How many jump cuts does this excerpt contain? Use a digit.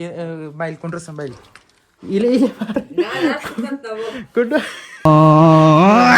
1